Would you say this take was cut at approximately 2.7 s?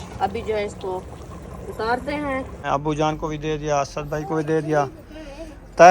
yes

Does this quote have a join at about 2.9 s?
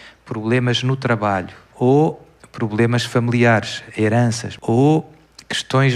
no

